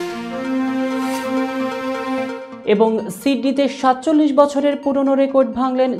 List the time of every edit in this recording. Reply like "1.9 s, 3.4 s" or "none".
none